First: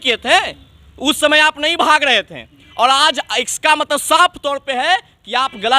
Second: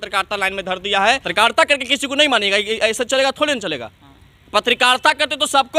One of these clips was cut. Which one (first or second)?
second